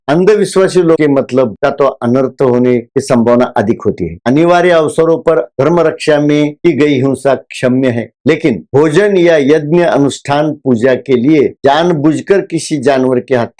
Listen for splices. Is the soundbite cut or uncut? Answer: uncut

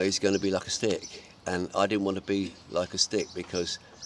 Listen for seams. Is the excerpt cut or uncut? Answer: uncut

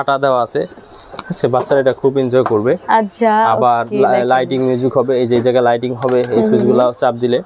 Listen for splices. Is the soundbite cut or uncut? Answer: uncut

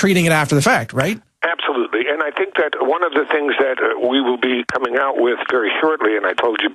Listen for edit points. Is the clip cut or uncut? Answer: cut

